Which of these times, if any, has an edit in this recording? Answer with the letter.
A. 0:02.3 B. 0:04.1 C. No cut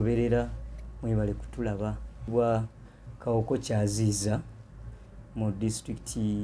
A